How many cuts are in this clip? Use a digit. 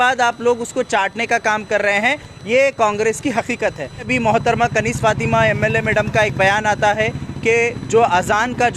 1